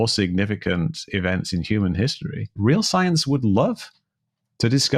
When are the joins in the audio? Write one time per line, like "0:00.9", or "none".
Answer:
0:02.5